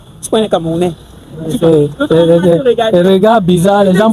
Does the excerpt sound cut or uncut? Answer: uncut